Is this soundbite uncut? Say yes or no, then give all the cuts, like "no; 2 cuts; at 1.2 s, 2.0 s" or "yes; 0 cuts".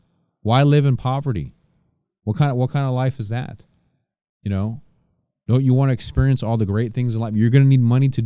yes; 0 cuts